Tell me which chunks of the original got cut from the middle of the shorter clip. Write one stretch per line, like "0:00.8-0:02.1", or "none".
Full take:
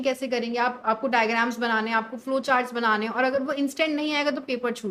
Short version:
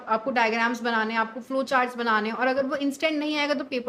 none